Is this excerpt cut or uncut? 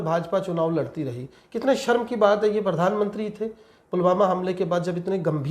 uncut